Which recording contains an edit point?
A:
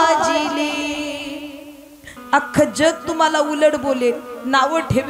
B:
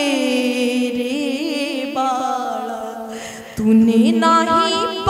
A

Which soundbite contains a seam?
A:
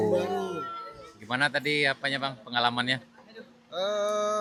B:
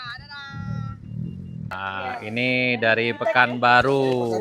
B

